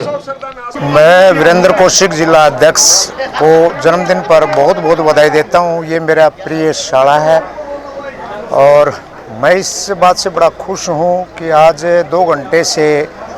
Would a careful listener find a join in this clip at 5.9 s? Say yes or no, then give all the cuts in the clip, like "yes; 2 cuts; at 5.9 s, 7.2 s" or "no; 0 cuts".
no; 0 cuts